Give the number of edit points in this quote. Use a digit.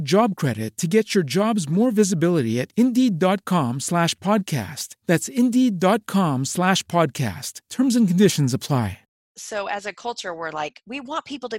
1